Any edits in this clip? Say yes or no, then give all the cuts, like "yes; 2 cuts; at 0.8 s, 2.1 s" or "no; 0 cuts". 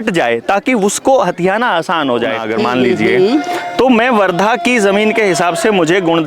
yes; 1 cut; at 2.4 s